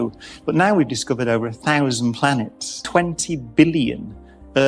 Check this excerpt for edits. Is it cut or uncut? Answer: cut